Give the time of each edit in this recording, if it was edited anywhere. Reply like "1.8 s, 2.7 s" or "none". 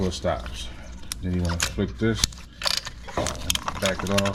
none